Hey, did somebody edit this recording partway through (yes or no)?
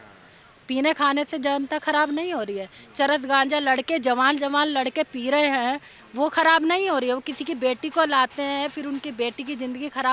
no